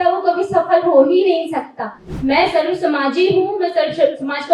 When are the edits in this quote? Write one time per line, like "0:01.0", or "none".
0:02.1